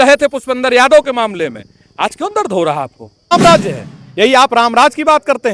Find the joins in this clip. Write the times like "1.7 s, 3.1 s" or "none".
3.3 s